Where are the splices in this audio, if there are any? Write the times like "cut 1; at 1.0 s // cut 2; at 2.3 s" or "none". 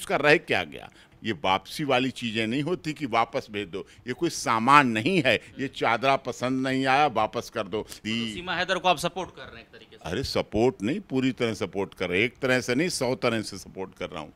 cut 1; at 1.1 s // cut 2; at 8.0 s